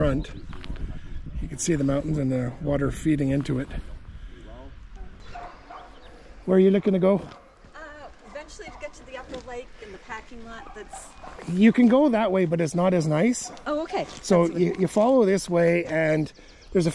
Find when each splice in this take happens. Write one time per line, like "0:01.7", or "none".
0:05.2

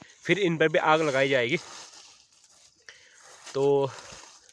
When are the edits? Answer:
none

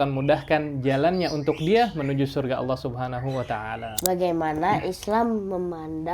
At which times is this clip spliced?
0:03.9

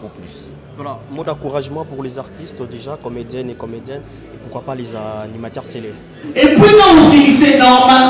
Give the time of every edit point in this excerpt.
0:06.2

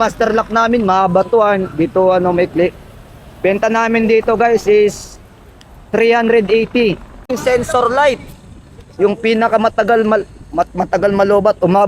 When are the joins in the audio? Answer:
0:07.3

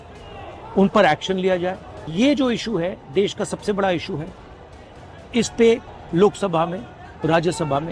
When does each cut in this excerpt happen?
0:02.1
0:06.0

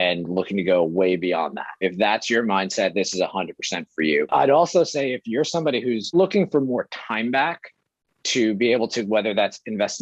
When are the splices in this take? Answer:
0:01.8
0:04.3
0:06.1

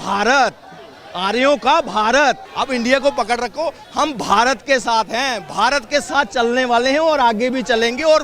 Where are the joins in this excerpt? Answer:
0:02.5

